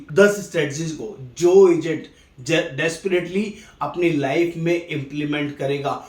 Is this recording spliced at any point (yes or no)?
no